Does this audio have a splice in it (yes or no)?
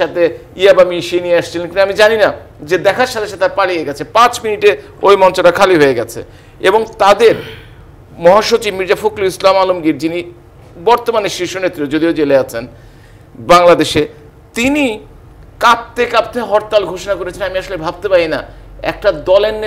no